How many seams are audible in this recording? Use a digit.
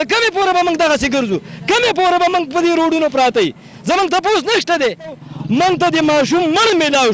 1